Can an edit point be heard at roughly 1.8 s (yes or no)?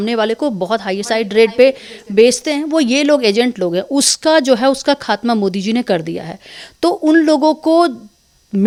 no